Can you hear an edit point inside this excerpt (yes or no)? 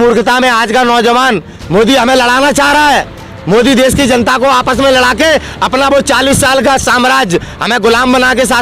yes